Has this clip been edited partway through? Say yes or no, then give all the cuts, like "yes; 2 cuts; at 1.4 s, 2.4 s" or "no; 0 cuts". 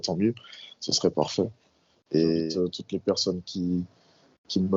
yes; 1 cut; at 2.4 s